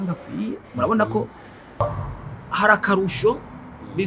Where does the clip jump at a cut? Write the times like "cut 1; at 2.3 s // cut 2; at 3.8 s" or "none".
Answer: cut 1; at 1.8 s